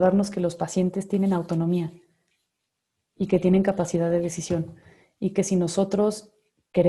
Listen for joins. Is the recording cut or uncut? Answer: uncut